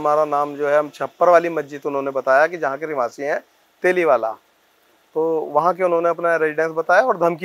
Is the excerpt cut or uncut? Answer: uncut